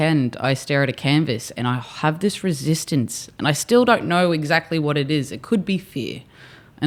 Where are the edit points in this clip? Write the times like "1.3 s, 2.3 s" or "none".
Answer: none